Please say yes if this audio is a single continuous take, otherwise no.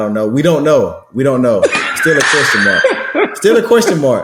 yes